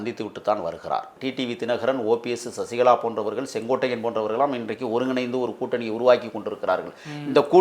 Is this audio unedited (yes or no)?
no